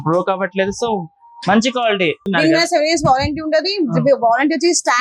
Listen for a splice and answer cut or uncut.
cut